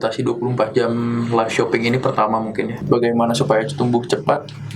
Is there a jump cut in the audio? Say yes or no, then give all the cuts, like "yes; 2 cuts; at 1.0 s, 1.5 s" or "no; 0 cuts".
yes; 1 cut; at 2.8 s